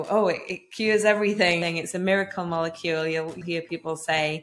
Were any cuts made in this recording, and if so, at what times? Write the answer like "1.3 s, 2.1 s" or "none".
1.6 s, 3.4 s